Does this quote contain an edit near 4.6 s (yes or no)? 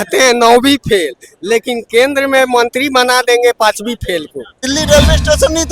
yes